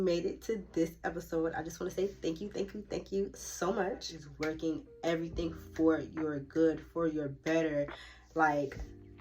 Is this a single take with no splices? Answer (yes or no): no